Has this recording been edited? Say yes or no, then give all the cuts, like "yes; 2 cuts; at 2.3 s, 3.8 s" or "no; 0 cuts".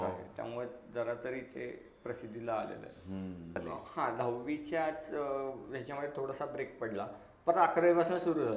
yes; 1 cut; at 3.6 s